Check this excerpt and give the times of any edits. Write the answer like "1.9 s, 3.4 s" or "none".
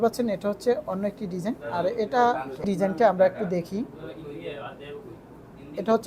2.6 s